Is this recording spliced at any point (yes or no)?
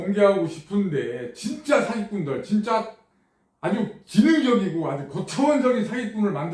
no